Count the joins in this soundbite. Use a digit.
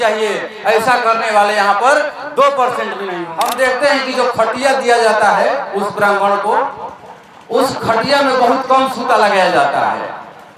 1